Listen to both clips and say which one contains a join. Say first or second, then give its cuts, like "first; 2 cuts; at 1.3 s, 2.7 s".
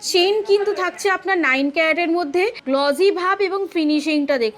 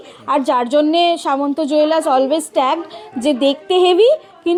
first; 1 cut; at 2.6 s